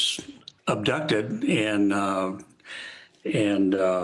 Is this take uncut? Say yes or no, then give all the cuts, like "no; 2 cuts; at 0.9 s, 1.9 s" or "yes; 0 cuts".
yes; 0 cuts